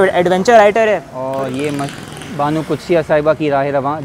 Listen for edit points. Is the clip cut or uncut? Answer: cut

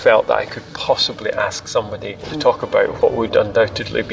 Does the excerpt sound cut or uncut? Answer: cut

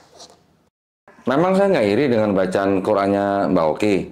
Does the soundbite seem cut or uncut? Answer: cut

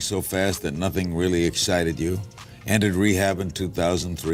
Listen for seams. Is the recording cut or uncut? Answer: uncut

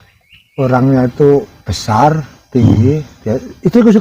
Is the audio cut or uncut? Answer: uncut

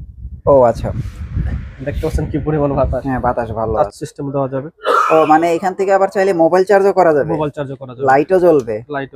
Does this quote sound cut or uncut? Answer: cut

